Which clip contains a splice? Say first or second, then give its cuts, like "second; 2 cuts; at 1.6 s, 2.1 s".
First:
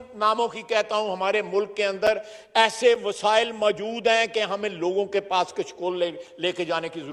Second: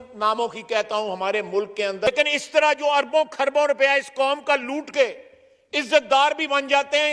second; 1 cut; at 2.1 s